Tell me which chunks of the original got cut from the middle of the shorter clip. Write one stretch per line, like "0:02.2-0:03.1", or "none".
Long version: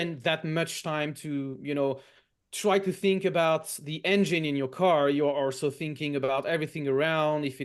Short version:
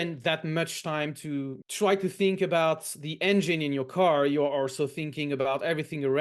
0:01.6-0:02.4

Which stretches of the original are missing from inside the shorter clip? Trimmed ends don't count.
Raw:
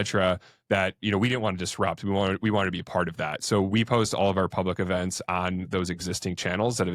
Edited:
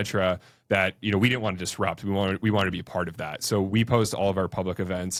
none

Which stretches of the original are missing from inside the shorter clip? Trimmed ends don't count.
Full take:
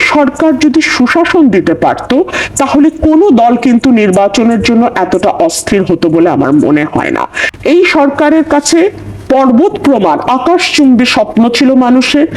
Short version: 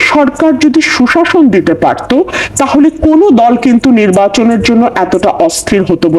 none

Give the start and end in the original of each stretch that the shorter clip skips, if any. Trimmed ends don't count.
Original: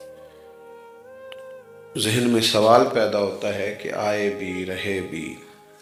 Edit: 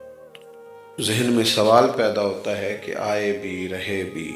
0:00.9-0:01.9

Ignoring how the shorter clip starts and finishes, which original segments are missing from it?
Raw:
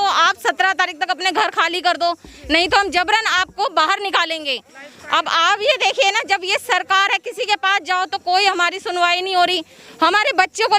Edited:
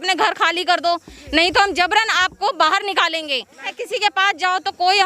0:04.9-0:07.2

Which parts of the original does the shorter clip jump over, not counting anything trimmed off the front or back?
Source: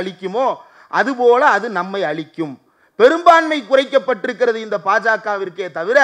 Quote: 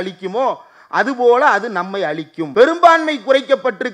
0:02.3-0:02.8

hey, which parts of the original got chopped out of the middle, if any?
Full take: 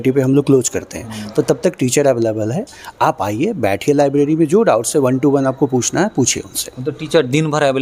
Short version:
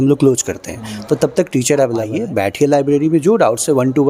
0:02.4-0:03.4

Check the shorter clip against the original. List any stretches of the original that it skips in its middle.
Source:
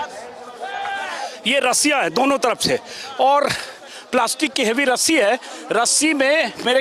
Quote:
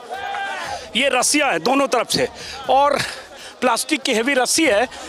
none

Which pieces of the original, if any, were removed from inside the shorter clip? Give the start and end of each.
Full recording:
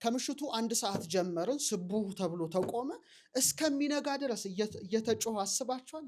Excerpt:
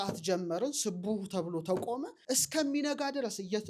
0:03.0-0:03.2

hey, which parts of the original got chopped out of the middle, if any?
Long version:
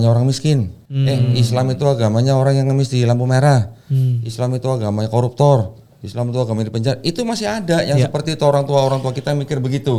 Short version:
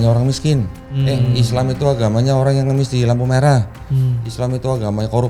none

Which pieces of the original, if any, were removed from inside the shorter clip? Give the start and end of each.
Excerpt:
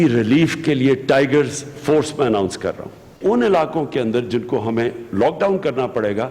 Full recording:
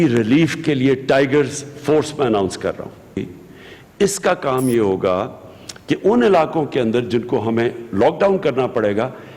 0:03.2-0:06.0

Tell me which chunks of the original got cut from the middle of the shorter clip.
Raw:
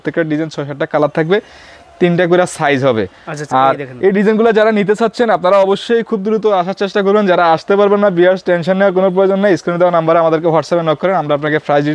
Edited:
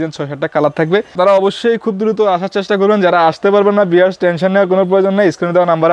0:01.5-0:05.4

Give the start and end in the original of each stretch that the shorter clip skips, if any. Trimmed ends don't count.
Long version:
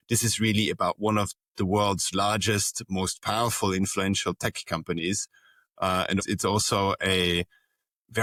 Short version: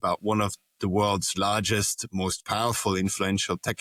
none

